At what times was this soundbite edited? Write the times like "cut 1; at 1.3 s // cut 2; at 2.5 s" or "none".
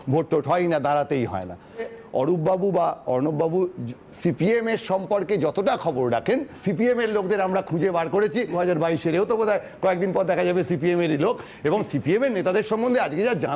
cut 1; at 2.0 s // cut 2; at 6.5 s // cut 3; at 8.5 s